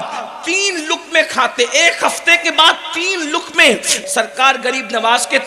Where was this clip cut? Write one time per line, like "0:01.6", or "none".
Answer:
0:04.0